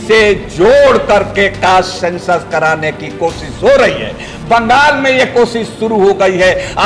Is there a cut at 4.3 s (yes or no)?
no